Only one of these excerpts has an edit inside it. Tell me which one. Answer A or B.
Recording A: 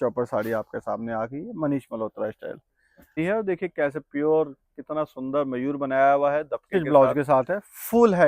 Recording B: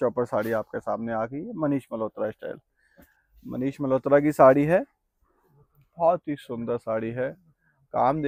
A